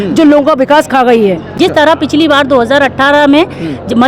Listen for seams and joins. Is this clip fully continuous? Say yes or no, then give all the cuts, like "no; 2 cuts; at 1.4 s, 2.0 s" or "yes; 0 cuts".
no; 1 cut; at 1.5 s